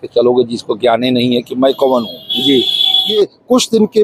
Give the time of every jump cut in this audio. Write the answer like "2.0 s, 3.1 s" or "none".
3.0 s